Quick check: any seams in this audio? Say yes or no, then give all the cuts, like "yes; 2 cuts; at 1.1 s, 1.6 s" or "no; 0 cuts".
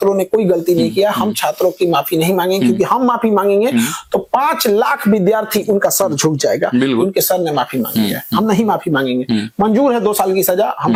no; 0 cuts